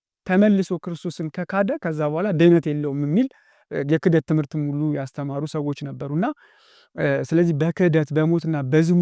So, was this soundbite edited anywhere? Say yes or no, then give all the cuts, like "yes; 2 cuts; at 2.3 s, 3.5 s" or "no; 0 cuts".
no; 0 cuts